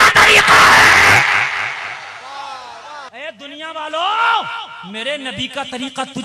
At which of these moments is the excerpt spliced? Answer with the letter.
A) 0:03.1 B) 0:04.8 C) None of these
A